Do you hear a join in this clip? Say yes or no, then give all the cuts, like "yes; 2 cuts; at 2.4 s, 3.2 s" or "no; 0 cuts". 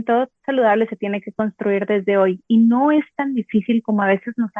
no; 0 cuts